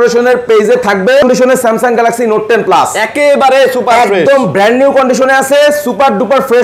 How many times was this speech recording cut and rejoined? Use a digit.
1